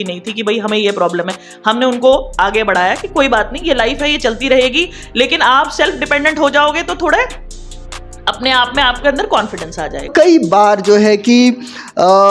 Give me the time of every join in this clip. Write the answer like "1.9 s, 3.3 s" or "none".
10.1 s